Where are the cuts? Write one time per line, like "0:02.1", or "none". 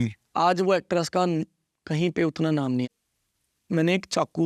0:02.9